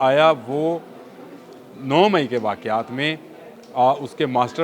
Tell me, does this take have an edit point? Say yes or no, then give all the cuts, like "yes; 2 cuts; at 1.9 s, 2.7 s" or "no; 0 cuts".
no; 0 cuts